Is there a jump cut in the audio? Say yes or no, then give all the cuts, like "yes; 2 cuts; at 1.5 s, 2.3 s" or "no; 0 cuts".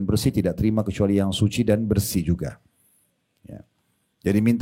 no; 0 cuts